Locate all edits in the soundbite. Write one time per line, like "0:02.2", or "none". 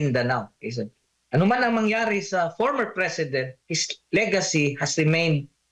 none